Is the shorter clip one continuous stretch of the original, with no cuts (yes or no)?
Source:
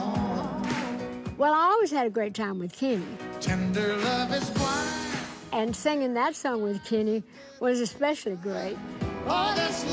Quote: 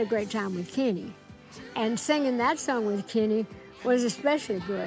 no